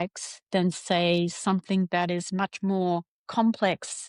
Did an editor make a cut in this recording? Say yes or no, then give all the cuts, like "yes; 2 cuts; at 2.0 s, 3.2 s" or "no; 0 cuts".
no; 0 cuts